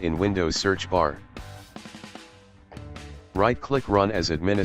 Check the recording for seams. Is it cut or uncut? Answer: cut